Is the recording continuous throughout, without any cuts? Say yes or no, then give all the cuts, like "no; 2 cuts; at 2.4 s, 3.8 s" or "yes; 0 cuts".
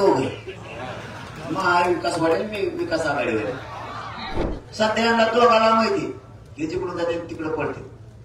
no; 1 cut; at 4.6 s